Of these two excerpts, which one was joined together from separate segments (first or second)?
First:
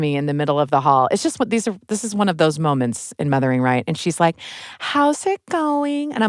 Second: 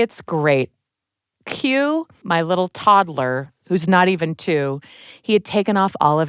second